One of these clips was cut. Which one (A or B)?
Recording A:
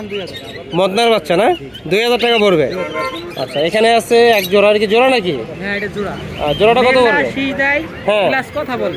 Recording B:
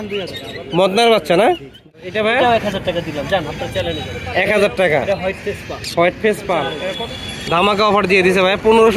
B